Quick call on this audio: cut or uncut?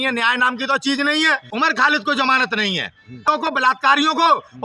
cut